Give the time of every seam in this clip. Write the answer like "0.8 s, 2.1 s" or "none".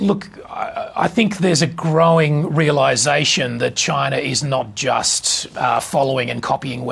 none